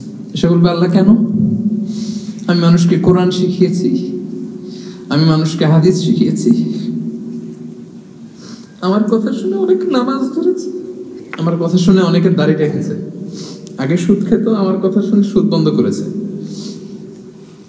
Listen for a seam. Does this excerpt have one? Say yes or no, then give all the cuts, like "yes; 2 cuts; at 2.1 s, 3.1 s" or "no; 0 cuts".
no; 0 cuts